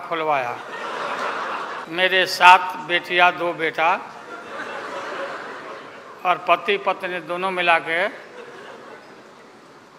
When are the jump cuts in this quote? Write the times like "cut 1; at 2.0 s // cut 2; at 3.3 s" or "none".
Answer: cut 1; at 1.8 s